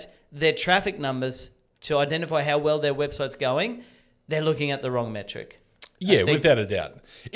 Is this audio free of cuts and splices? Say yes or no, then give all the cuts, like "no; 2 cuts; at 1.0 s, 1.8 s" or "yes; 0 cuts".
yes; 0 cuts